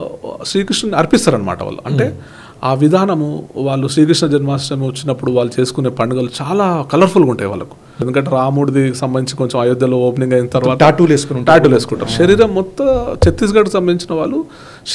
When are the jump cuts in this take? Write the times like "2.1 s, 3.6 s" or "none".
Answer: 8.0 s

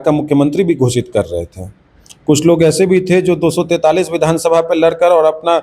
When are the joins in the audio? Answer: none

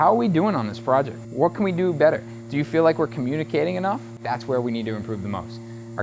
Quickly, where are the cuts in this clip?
1.2 s, 4.2 s

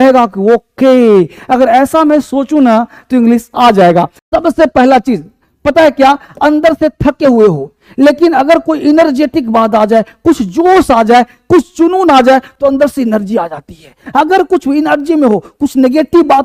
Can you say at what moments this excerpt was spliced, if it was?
4.2 s

